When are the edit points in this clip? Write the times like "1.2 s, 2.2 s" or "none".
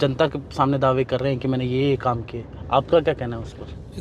none